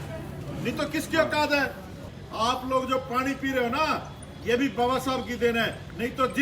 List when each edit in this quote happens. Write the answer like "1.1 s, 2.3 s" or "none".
2.1 s